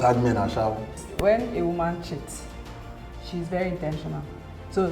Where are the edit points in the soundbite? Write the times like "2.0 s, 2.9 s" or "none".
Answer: 1.0 s